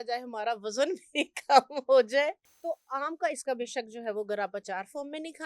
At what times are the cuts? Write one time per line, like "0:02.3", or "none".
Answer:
0:02.5